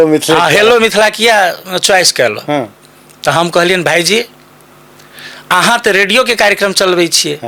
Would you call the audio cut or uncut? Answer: uncut